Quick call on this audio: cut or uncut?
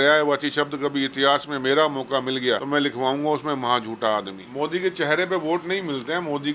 cut